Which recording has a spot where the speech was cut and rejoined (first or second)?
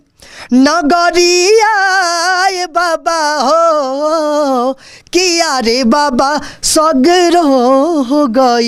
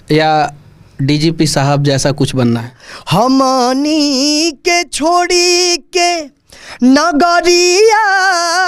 second